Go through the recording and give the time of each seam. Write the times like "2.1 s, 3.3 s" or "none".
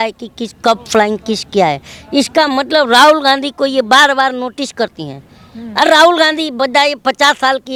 none

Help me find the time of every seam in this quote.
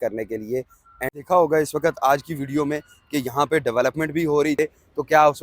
1.1 s, 4.6 s

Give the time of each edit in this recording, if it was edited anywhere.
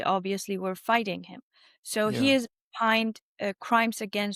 none

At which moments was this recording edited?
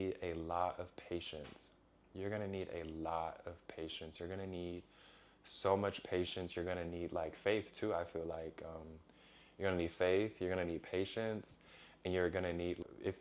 none

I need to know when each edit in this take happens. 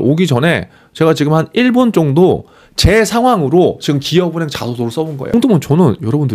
5.3 s

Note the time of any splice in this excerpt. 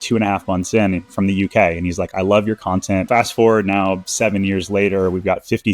3.1 s

